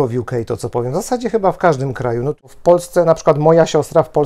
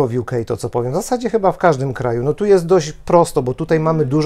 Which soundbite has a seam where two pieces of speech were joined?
first; 1 cut; at 2.4 s

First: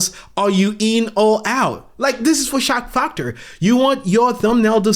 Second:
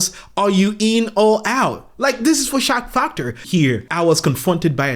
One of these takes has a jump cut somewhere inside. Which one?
second; 1 cut; at 3.4 s

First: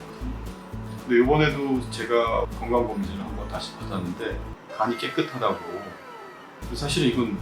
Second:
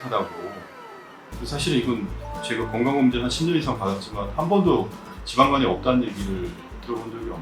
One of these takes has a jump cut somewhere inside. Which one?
first; 1 cut; at 2.5 s

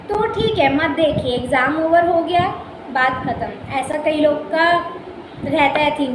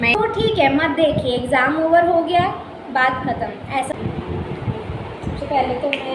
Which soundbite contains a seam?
second; 1 cut; at 3.9 s

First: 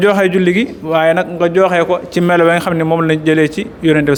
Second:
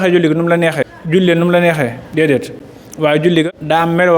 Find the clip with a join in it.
second; 2 cuts; at 0.9 s, 3.5 s

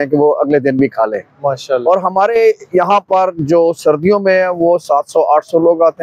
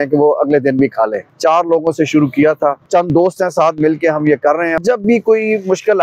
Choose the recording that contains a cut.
second; 3 cuts; at 1.2 s, 2.8 s, 4.7 s

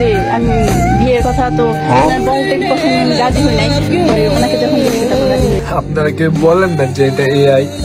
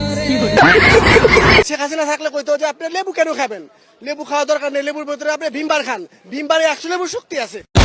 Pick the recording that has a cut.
second; 1 cut; at 1.7 s

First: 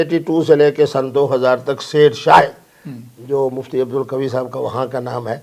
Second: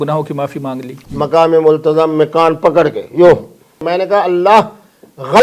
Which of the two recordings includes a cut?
second; 2 cuts; at 1.0 s, 3.8 s

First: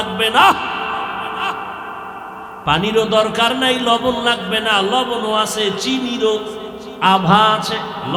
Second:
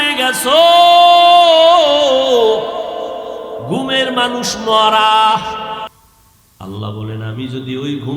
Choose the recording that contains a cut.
second; 1 cut; at 5.9 s

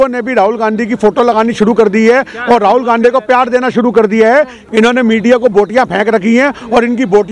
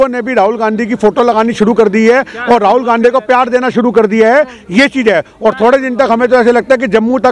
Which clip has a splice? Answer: first; 1 cut; at 4.6 s

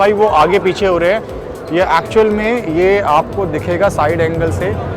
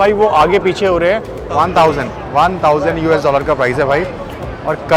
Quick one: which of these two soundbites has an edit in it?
second; 1 cut; at 1.4 s

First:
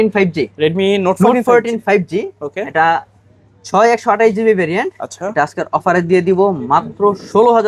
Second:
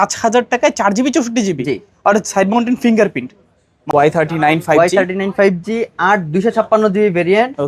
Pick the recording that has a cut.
second; 1 cut; at 3.8 s

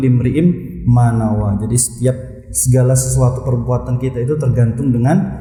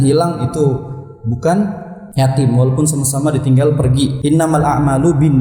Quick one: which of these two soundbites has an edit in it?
second; 1 cut; at 4.2 s

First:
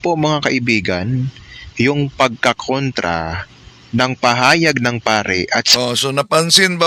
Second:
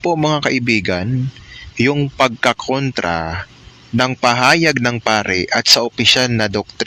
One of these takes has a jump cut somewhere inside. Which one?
second; 1 cut; at 5.7 s

